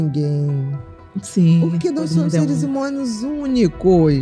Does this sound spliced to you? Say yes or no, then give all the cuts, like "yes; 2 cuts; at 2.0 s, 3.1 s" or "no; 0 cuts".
no; 0 cuts